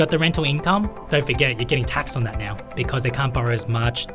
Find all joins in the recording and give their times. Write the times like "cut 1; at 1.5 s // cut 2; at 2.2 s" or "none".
cut 1; at 1.0 s // cut 2; at 2.6 s